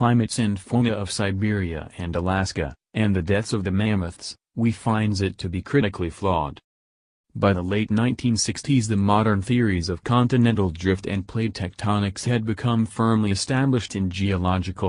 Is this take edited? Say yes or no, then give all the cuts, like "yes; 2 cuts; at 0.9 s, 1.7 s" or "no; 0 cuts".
no; 0 cuts